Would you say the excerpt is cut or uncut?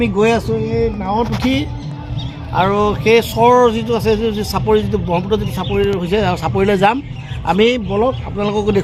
uncut